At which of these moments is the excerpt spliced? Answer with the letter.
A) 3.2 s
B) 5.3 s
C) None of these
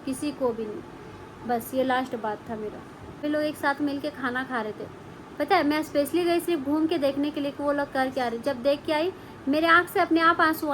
A